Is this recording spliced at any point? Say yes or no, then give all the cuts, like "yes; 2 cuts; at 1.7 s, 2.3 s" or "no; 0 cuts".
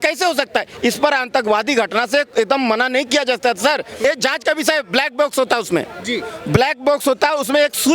yes; 1 cut; at 4.0 s